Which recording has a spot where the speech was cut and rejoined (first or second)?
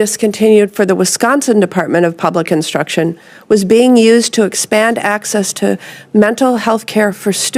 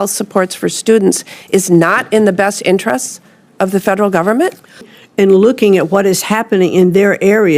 second